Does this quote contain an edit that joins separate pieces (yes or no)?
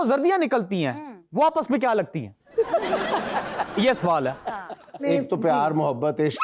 yes